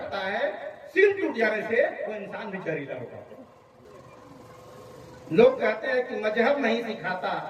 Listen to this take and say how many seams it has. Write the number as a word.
one